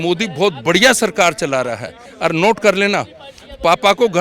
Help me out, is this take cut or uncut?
uncut